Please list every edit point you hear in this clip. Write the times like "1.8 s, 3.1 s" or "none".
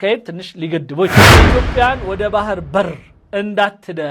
1.4 s